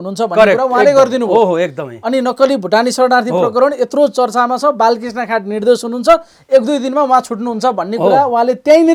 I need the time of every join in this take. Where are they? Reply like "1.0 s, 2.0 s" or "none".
none